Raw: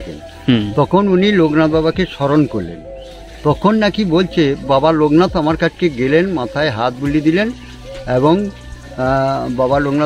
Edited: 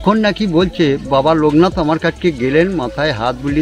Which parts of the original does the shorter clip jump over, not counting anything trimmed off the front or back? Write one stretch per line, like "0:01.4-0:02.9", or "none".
none